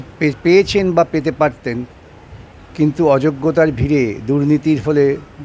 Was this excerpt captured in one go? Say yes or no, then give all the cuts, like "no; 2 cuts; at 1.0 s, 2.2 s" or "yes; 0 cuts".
yes; 0 cuts